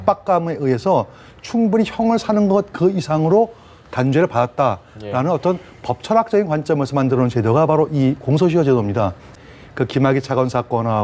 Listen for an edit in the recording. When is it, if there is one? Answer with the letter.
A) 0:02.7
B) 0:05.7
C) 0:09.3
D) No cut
C